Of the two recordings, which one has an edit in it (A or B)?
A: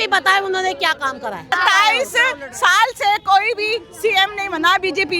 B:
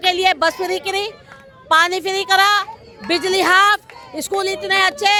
A